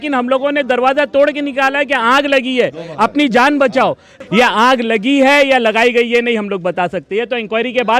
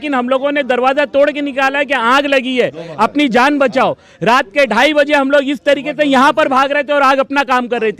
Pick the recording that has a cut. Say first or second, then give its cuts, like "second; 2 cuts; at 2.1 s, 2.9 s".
first; 1 cut; at 4.1 s